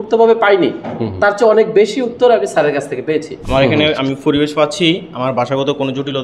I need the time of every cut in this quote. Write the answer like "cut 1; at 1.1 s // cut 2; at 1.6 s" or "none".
cut 1; at 3.4 s